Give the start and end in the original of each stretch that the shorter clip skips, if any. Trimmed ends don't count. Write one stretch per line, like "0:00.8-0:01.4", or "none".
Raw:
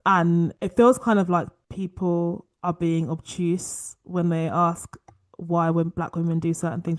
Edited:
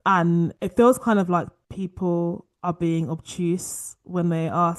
none